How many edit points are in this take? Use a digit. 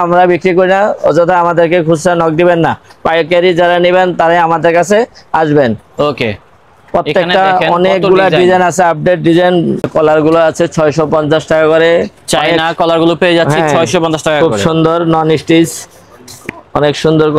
1